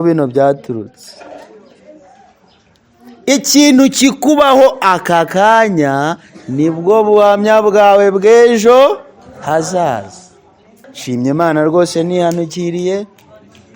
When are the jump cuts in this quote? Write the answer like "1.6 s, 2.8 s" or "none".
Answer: 11.0 s